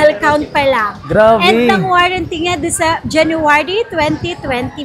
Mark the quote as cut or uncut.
uncut